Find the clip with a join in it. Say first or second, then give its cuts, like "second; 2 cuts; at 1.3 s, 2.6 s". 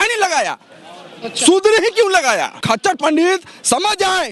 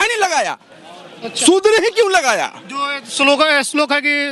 first; 1 cut; at 2.6 s